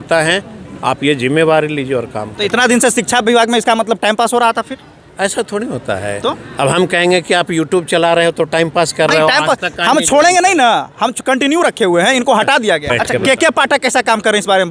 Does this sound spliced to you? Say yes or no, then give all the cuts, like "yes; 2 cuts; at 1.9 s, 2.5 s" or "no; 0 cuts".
yes; 1 cut; at 13.0 s